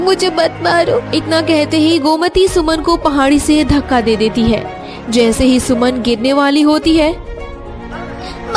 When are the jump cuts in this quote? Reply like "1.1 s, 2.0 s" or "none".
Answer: 1.1 s